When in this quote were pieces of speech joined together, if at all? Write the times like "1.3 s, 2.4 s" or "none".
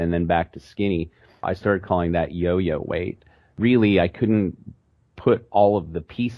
1.5 s, 3.5 s